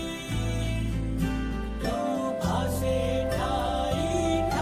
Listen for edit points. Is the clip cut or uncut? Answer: uncut